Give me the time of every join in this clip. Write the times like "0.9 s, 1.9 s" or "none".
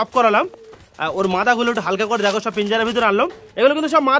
none

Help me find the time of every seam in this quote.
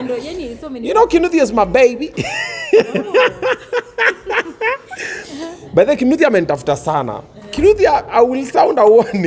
none

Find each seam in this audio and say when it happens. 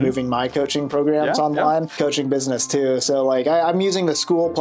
1.9 s

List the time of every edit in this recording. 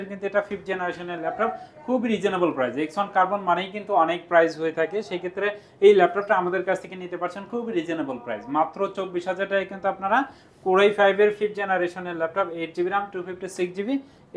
none

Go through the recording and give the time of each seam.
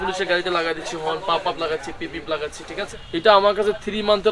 3.0 s

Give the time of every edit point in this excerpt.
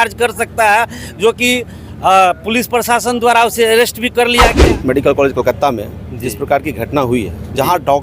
4.6 s

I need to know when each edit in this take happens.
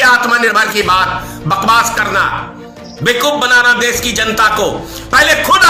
none

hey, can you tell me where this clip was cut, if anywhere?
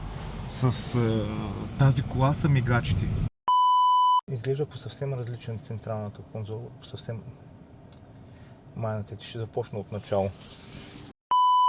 3.5 s, 4.3 s

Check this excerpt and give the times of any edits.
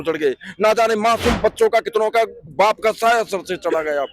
2.4 s

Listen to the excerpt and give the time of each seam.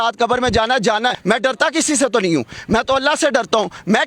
1.2 s

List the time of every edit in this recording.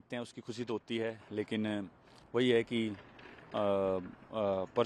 none

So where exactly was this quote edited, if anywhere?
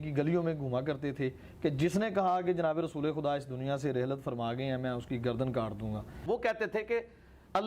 6.1 s

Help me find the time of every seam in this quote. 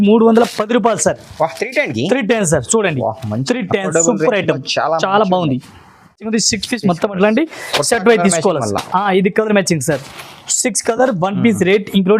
6.3 s

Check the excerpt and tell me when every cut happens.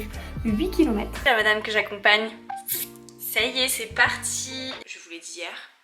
1.2 s, 4.8 s

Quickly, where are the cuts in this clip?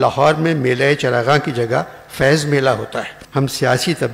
3.2 s

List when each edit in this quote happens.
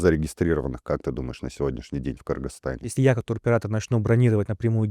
2.9 s

